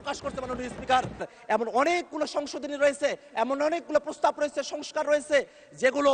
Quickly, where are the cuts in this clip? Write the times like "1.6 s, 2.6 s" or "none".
1.3 s